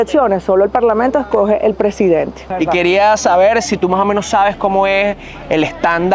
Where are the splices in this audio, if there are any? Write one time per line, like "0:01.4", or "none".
0:02.6